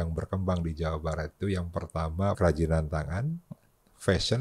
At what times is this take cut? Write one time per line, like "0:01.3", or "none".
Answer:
0:02.4